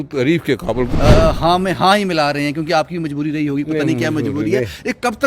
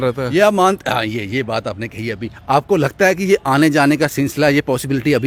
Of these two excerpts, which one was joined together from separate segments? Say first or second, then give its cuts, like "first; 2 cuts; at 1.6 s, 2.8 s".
first; 1 cut; at 0.9 s